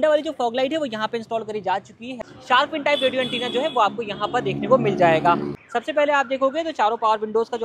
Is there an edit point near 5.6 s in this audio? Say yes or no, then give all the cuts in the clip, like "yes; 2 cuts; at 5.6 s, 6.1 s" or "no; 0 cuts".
yes; 2 cuts; at 2.2 s, 5.6 s